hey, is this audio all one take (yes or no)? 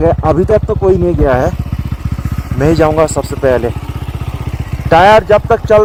yes